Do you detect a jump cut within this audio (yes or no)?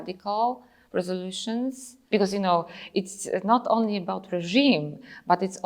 yes